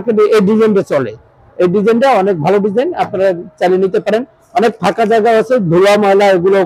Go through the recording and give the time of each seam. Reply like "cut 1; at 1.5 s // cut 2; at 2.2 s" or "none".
none